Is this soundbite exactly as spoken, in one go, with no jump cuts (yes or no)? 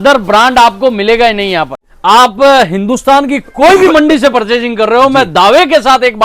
no